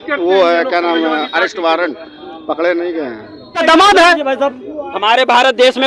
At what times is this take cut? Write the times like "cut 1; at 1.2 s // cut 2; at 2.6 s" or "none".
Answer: cut 1; at 3.6 s